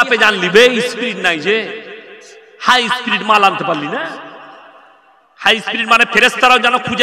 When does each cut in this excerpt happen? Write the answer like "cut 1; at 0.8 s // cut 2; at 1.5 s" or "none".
none